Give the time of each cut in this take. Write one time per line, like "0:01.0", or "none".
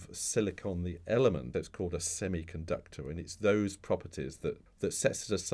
0:01.5
0:04.7

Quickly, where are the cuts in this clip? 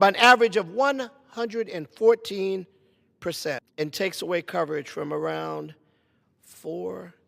0:03.7

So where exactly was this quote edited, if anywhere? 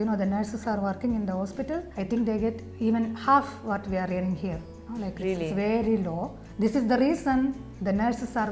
none

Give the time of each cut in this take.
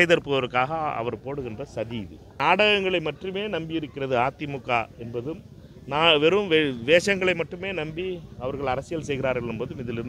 0:02.2

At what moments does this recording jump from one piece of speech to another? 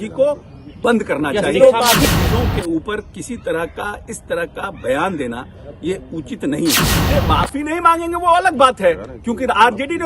0:02.0
0:07.0

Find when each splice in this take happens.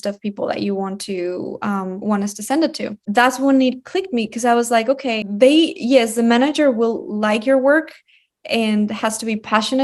0:03.0
0:05.3

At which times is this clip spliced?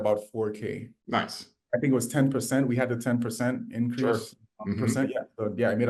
none

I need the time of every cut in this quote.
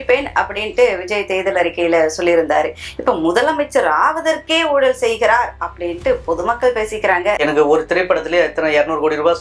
0:07.4

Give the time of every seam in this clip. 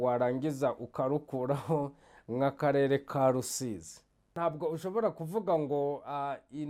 0:04.4

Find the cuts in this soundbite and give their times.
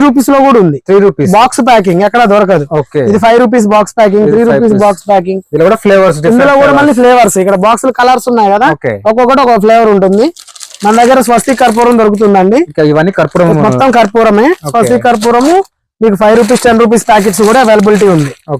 none

